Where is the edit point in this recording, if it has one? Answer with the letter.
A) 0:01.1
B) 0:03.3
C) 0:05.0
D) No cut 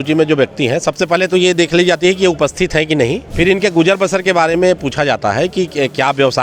B